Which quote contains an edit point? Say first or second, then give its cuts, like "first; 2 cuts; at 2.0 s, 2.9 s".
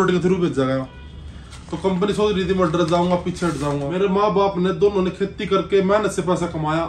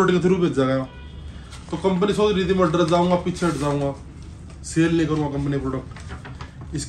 first; 1 cut; at 3.9 s